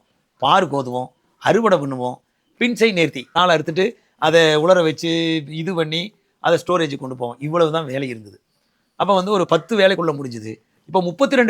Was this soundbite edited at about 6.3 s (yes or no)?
no